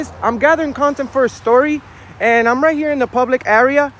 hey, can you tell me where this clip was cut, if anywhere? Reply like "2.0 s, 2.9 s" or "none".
none